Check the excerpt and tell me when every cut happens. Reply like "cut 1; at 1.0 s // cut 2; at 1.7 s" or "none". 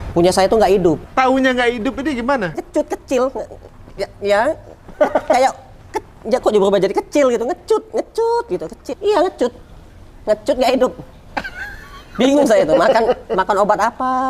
cut 1; at 1.1 s // cut 2; at 2.6 s // cut 3; at 8.9 s